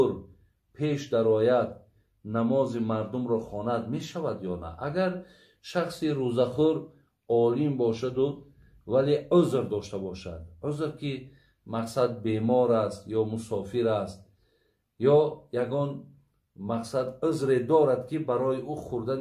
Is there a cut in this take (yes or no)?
no